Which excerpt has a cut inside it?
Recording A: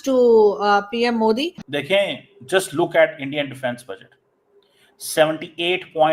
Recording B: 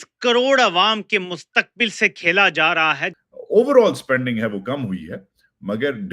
B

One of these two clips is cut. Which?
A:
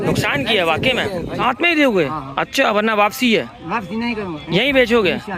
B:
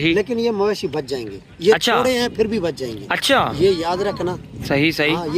A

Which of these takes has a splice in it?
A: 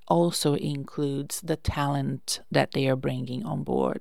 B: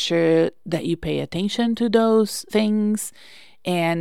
B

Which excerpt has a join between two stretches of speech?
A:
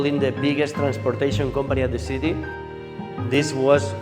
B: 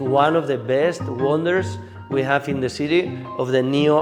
A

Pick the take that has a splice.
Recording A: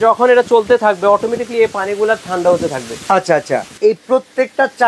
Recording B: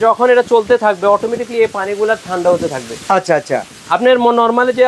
A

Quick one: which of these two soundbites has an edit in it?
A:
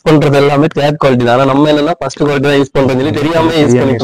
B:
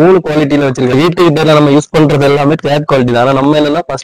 B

